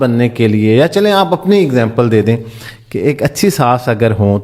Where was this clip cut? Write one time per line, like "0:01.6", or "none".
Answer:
none